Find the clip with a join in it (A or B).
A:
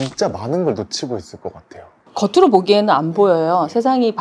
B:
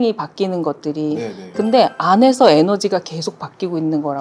A